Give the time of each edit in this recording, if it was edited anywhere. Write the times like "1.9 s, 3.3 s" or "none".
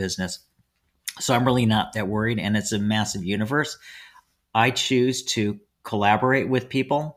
none